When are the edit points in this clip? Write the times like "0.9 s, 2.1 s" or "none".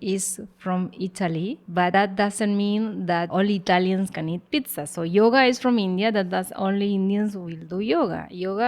1.7 s, 3.3 s